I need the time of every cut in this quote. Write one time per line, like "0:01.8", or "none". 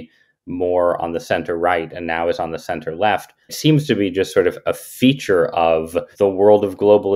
0:03.5
0:06.1